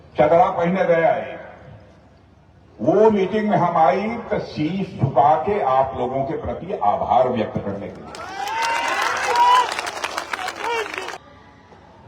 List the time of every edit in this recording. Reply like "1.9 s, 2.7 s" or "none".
11.1 s